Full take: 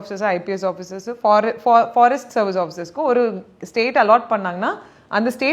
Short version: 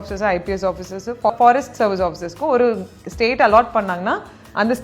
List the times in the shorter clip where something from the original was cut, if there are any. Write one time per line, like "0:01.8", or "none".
0:01.3